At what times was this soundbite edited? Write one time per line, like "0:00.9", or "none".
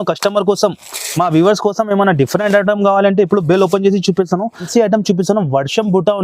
0:04.6